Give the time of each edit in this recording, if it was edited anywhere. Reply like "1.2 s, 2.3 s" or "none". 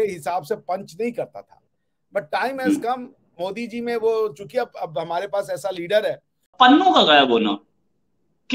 6.5 s